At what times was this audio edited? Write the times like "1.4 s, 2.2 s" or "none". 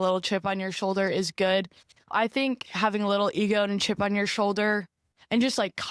2.1 s